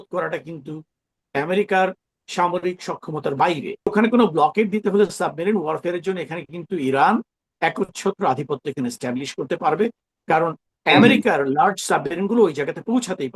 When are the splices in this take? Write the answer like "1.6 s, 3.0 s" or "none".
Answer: 3.9 s

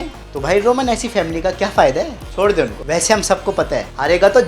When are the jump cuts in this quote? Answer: 2.8 s

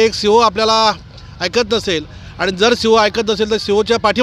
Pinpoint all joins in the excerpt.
none

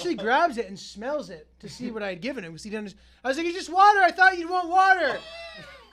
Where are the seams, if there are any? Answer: none

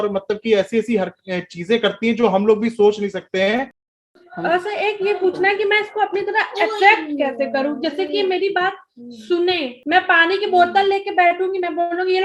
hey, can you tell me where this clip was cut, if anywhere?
3.8 s, 9.7 s

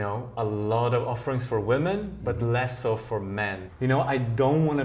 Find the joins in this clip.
3.6 s

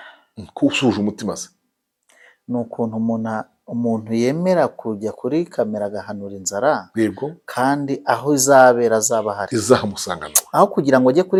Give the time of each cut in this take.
none

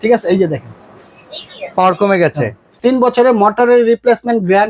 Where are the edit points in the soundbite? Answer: 2.7 s

